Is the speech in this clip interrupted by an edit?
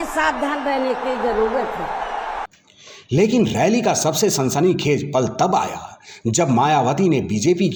no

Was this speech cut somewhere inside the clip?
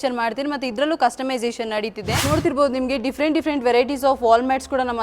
yes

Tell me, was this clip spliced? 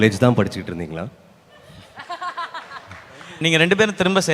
yes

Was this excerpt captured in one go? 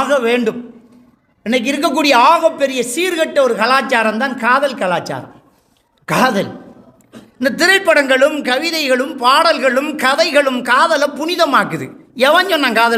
yes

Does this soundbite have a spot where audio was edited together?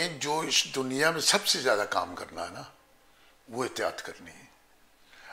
no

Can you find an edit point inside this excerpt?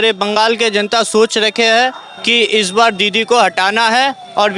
no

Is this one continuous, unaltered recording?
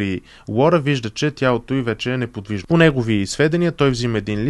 no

